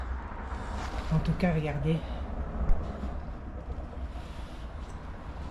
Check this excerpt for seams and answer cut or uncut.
uncut